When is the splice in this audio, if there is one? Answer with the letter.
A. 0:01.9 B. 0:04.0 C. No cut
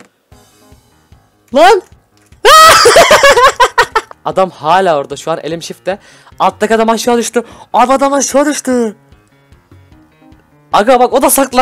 B